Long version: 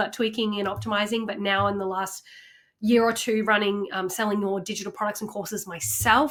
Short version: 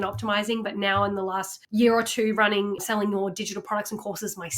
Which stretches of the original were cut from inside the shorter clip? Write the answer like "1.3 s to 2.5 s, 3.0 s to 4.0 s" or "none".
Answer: 2.2 s to 2.6 s, 3.9 s to 4.1 s